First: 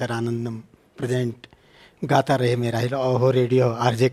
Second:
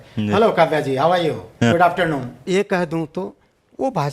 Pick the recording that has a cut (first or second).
second